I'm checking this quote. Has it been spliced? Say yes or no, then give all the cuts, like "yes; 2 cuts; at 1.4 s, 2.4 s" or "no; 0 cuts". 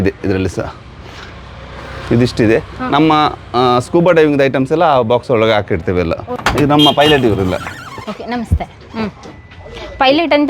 yes; 1 cut; at 6.3 s